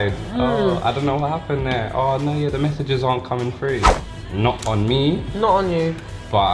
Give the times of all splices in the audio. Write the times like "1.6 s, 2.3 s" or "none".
3.9 s